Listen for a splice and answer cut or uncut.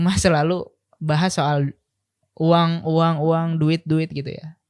uncut